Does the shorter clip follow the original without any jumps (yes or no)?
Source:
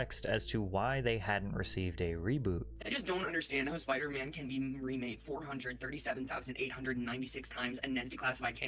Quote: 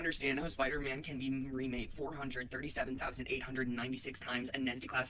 yes